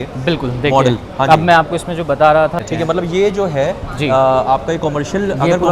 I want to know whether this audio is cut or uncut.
cut